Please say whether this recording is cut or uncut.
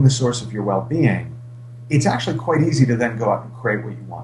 cut